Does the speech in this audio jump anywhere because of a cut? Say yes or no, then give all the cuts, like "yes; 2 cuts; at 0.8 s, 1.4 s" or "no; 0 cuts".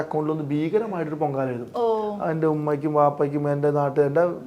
no; 0 cuts